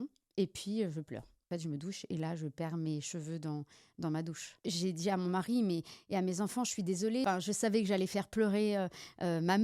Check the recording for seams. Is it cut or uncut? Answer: cut